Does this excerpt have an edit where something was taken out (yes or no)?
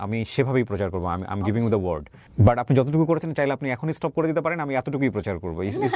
yes